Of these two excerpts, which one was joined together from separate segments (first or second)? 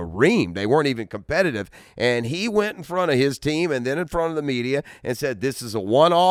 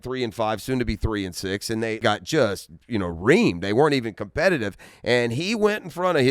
second